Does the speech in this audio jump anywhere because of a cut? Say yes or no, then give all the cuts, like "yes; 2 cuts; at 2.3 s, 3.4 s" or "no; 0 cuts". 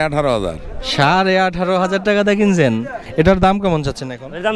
yes; 1 cut; at 3.0 s